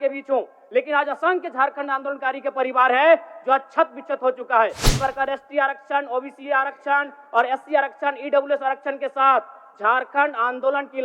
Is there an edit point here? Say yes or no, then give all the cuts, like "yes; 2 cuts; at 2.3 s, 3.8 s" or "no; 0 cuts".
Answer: yes; 1 cut; at 4.8 s